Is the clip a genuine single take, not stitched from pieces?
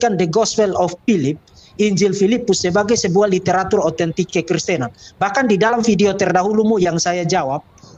yes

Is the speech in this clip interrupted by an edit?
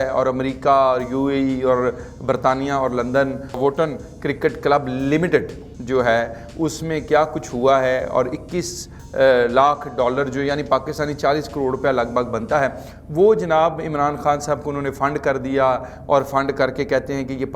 no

